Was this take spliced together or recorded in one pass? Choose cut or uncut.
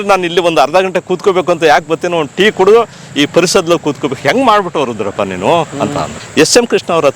cut